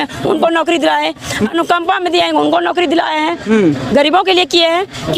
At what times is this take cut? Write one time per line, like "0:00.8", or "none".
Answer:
none

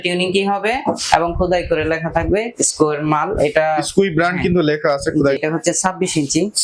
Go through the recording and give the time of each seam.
0:05.4

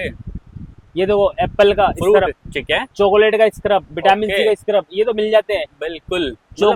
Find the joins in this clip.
none

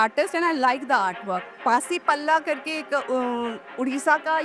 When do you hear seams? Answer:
0:01.5

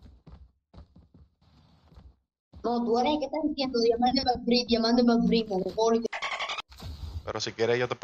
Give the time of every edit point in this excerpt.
none

